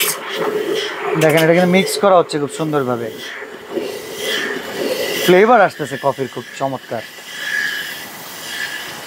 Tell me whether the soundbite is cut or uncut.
uncut